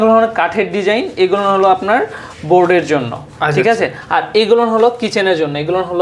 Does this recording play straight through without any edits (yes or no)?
yes